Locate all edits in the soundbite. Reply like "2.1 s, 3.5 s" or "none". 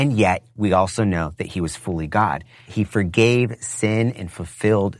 2.7 s